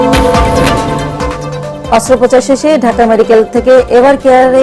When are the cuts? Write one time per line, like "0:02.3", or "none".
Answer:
0:01.7